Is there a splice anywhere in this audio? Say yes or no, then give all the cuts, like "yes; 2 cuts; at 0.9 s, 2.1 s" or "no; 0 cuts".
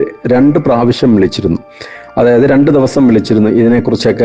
no; 0 cuts